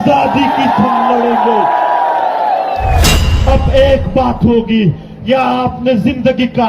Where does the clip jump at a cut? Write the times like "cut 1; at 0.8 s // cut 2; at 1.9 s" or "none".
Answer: cut 1; at 3.2 s